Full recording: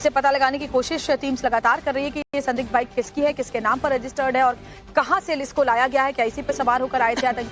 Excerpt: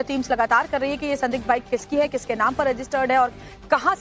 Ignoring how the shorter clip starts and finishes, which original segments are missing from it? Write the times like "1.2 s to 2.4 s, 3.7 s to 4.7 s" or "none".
2.2 s to 2.3 s